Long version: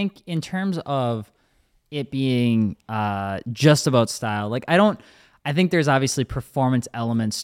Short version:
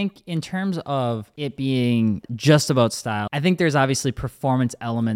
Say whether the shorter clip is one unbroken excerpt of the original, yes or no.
no